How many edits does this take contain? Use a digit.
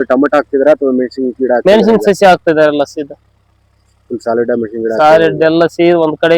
0